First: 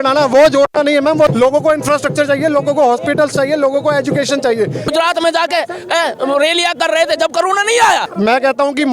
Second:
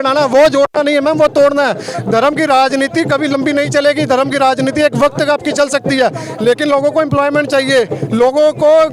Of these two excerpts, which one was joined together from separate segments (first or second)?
first